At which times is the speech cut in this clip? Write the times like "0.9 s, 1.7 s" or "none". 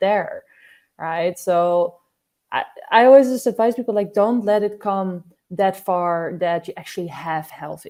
none